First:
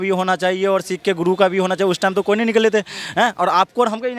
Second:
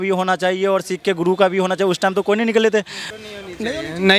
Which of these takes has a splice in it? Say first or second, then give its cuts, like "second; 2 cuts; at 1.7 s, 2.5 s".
second; 1 cut; at 3.0 s